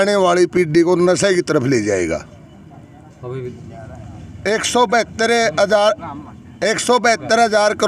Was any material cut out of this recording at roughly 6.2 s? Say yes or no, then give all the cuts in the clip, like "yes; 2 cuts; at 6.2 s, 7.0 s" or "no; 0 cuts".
no; 1 cut; at 3.5 s